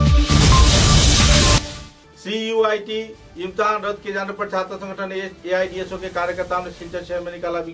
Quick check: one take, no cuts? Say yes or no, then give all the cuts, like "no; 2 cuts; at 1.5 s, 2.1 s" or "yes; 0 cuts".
yes; 0 cuts